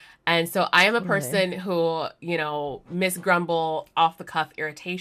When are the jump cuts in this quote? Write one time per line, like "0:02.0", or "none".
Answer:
none